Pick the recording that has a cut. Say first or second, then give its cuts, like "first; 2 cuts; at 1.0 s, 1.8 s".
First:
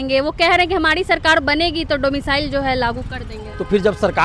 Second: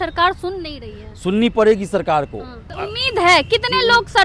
second; 1 cut; at 2.7 s